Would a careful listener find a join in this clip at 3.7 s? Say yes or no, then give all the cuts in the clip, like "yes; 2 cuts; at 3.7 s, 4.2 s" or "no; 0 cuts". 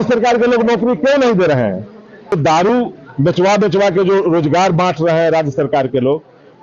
no; 1 cut; at 2.3 s